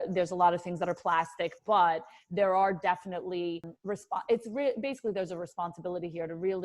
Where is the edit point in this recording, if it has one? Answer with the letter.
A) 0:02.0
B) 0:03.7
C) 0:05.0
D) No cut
B